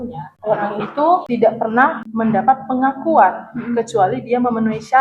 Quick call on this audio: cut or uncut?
uncut